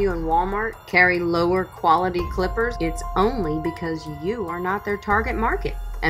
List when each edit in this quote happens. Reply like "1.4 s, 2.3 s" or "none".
2.7 s